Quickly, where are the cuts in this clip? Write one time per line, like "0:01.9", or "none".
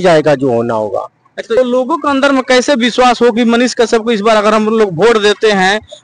0:01.6